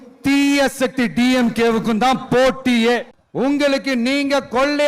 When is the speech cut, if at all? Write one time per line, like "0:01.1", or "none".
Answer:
0:03.2